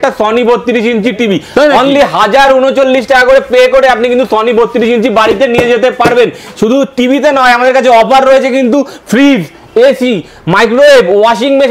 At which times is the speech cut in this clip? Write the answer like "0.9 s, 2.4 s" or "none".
none